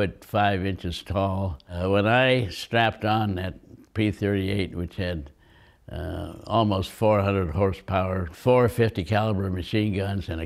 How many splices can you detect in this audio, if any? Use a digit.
2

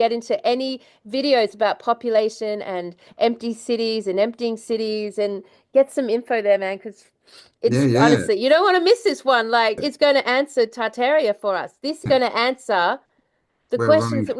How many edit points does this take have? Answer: 2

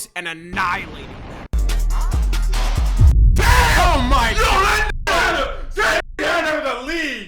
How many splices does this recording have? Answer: 1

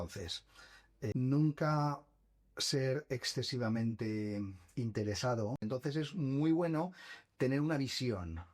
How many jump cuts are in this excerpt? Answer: 2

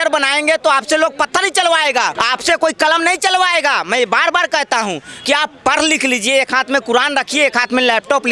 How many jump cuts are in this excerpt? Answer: 1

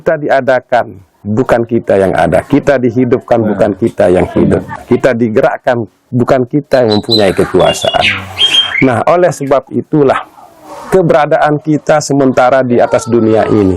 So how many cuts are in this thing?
1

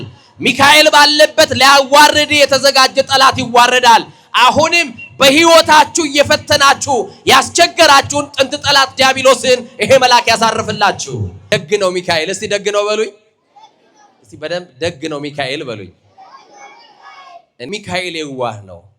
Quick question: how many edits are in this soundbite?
2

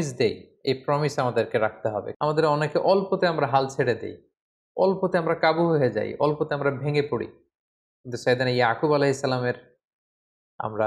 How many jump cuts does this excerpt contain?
1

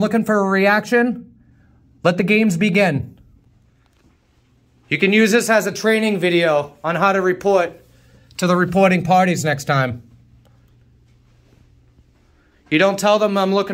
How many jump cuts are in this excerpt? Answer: 0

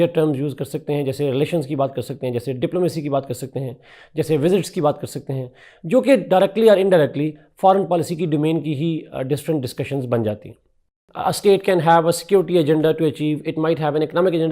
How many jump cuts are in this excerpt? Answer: 1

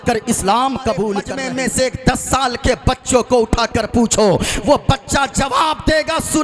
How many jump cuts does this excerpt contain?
1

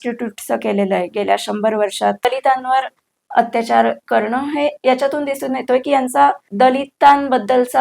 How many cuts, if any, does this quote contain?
2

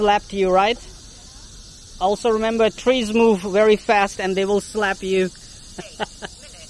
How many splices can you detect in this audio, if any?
0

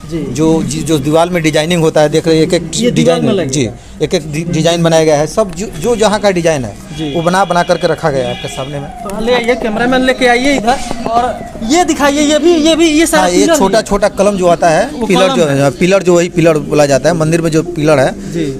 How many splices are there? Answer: 0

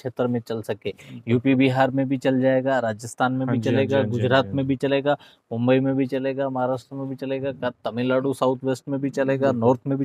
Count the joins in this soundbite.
0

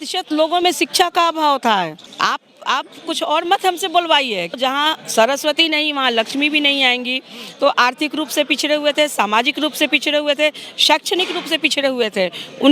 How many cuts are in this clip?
2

